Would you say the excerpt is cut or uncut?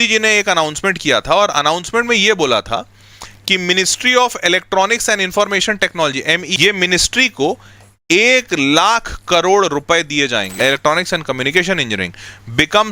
cut